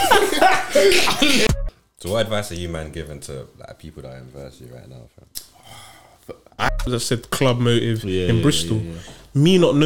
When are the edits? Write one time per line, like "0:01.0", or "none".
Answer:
0:01.5
0:06.7